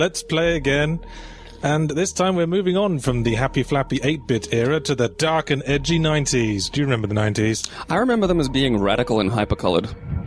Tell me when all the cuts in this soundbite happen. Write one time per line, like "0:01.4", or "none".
none